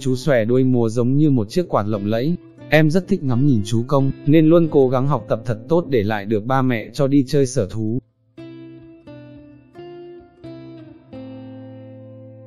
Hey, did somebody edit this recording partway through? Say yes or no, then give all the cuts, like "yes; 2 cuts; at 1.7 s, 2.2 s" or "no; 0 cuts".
yes; 1 cut; at 8.1 s